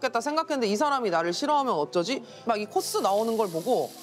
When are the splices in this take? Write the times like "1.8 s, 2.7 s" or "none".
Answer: 2.3 s